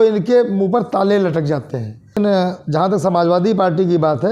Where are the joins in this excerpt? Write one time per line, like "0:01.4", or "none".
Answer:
0:02.2